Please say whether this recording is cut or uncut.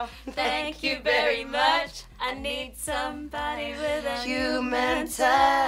uncut